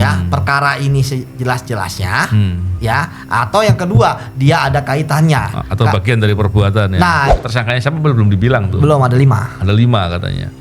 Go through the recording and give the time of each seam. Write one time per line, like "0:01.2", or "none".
0:07.3